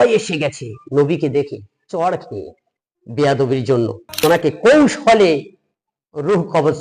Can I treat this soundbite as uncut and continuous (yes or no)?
no